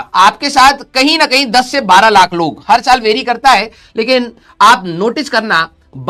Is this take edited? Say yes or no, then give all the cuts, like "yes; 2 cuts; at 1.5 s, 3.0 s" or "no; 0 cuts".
no; 0 cuts